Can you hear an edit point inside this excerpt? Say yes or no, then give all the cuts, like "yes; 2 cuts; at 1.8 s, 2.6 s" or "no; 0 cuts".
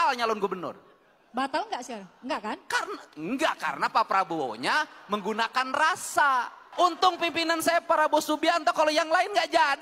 yes; 1 cut; at 6.4 s